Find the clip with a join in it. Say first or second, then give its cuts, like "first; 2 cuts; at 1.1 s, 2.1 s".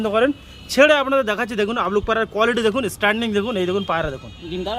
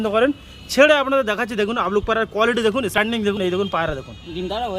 second; 1 cut; at 3.0 s